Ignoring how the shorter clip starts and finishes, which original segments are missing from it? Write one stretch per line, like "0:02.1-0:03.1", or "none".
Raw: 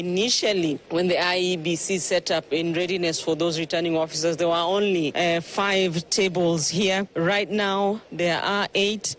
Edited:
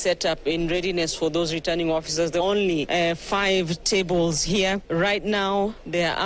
0:04.5-0:04.7